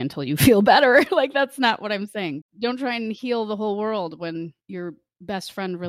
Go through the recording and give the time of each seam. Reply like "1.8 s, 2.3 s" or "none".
2.5 s, 4.6 s